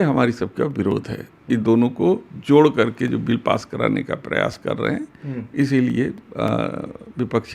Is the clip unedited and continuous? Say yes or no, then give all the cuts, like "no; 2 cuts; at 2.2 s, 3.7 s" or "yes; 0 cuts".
yes; 0 cuts